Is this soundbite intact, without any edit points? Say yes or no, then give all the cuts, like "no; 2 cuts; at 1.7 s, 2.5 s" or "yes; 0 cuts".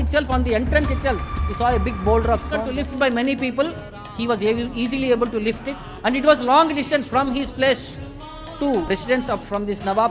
no; 1 cut; at 2.8 s